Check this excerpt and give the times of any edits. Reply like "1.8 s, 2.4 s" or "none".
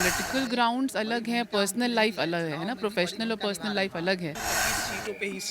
4.5 s